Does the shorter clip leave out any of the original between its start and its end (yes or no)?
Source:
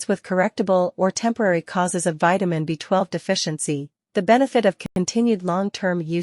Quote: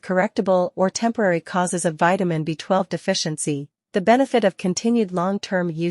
yes